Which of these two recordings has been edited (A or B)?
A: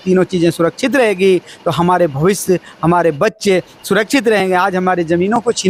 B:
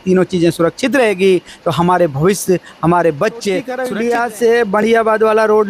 B